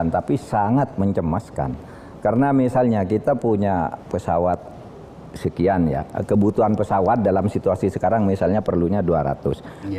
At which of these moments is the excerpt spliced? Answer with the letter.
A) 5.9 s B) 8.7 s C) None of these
C